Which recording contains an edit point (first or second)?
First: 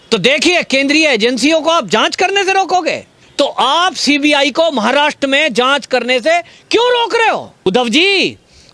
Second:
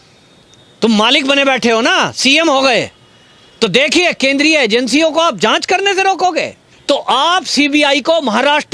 first